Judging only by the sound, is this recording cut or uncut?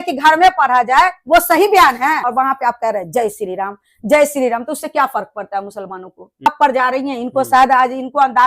cut